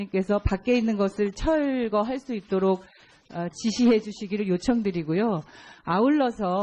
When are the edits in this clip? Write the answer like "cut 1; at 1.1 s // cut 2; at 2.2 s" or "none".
cut 1; at 1.8 s